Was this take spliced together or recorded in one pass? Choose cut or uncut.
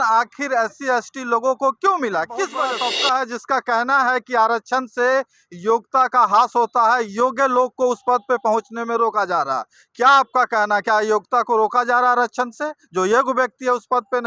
cut